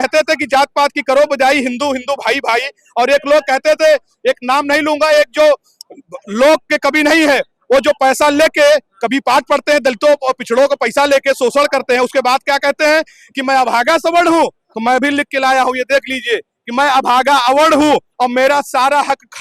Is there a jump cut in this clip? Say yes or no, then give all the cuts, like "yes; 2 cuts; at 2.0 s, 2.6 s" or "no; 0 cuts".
no; 0 cuts